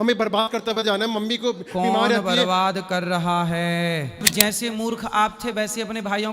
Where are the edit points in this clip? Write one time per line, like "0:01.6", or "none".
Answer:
0:04.2